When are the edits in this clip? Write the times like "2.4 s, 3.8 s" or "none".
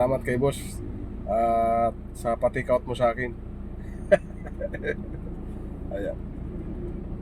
none